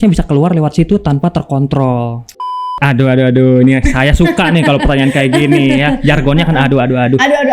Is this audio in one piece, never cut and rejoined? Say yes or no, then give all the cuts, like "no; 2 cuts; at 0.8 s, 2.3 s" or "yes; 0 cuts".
no; 1 cut; at 2.7 s